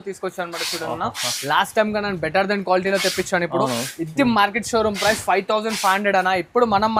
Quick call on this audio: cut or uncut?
uncut